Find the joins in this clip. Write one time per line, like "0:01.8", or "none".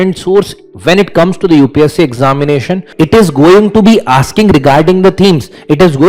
0:02.9